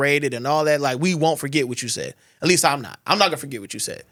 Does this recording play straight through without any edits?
yes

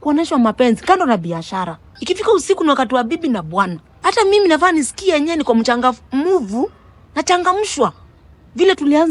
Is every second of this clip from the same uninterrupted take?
no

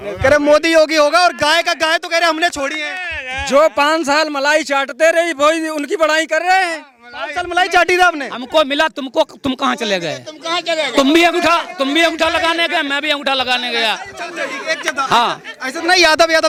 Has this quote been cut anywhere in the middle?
no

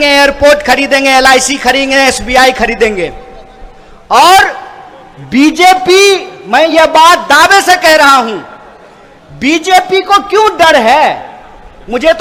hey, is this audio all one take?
yes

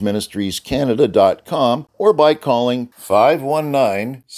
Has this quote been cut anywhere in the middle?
yes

